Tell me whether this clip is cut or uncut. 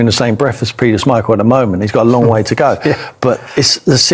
uncut